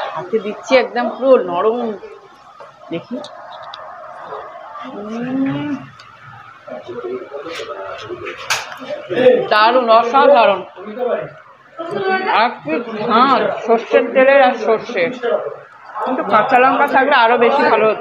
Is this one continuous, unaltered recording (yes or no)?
yes